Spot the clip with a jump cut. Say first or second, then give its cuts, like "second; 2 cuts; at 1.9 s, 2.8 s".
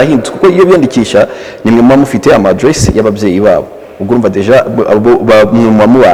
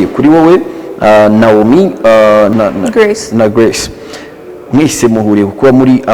second; 1 cut; at 2.5 s